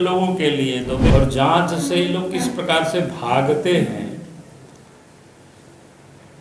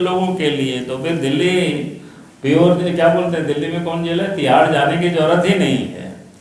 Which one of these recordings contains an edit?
first; 1 cut; at 1.1 s

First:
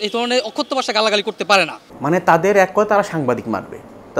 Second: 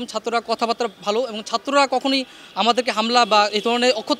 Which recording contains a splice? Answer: first; 1 cut; at 1.8 s

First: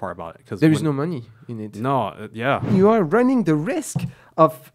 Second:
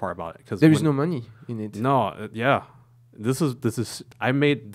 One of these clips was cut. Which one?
first; 1 cut; at 2.7 s

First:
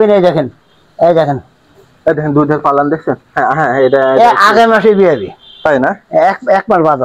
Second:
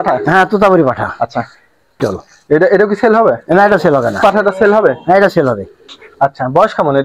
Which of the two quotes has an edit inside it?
second; 2 cuts; at 2.0 s, 4.2 s

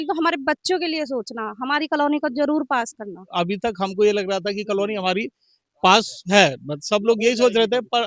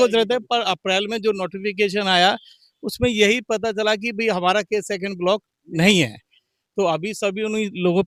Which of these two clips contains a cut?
first; 1 cut; at 3.2 s

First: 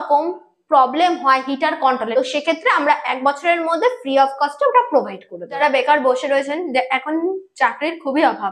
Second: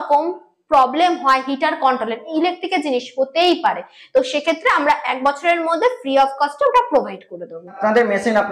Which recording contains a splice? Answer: first; 2 cuts; at 2.1 s, 5.6 s

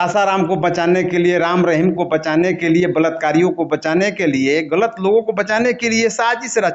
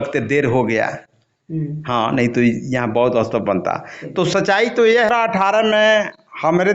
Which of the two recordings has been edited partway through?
second; 1 cut; at 5.1 s

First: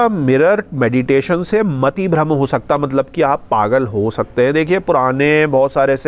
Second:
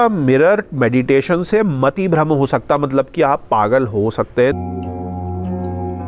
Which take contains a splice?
second; 1 cut; at 4.5 s

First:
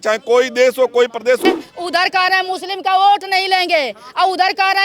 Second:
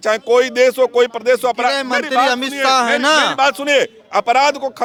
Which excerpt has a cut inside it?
first; 1 cut; at 1.4 s

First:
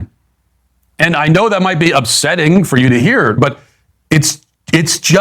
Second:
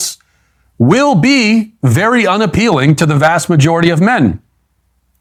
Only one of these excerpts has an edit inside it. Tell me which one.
first; 1 cut; at 3.4 s

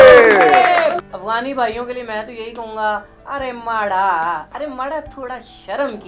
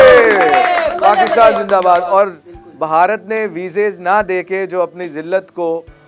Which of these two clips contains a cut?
first; 1 cut; at 0.9 s

